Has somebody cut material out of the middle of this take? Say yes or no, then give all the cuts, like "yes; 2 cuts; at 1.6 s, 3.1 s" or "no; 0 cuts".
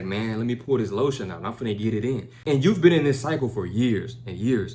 yes; 1 cut; at 2.3 s